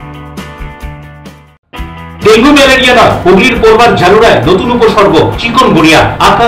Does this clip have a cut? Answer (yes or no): yes